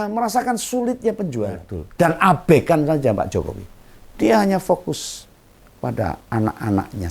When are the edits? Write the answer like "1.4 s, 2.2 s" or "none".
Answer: 1.8 s

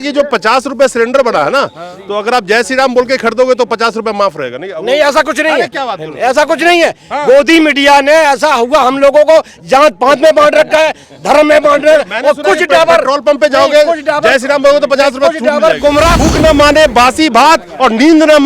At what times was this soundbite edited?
16.1 s

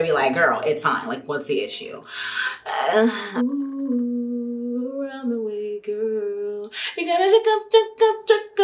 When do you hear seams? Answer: 3.2 s

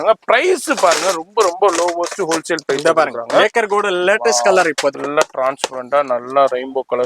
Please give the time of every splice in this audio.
5.0 s

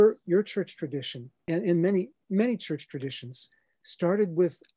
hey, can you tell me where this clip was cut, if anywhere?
1.3 s, 2.2 s

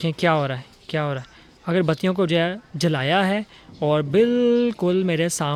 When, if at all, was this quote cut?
none

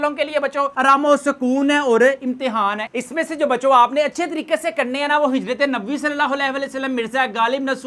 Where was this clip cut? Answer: 2.9 s

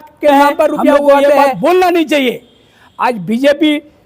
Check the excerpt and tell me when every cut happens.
1.4 s

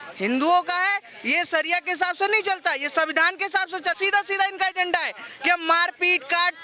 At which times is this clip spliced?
4.0 s

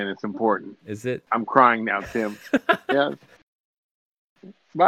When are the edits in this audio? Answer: none

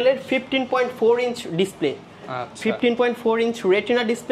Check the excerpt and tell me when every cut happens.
none

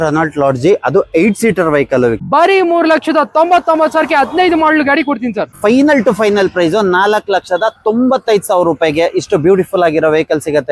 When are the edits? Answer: 2.2 s, 5.6 s

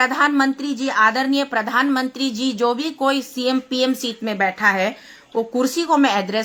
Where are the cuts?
none

